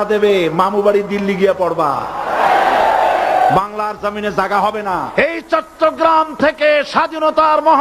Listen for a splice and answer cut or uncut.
cut